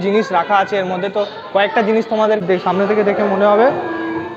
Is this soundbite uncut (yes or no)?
no